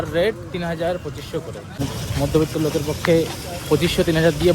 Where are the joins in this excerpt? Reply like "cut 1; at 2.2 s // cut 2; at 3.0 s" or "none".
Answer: cut 1; at 1.8 s